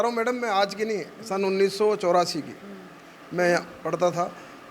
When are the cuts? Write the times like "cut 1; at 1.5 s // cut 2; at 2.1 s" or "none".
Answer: none